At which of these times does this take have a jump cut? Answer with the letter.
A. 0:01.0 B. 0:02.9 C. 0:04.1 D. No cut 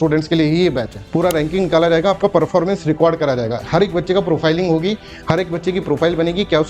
A